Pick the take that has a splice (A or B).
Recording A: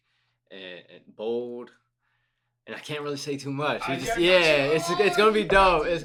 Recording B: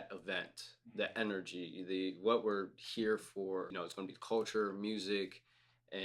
B